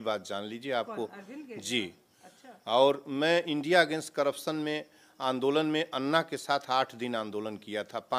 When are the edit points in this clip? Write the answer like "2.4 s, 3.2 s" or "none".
none